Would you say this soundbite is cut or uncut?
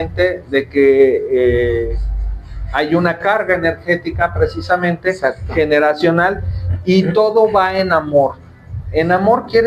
uncut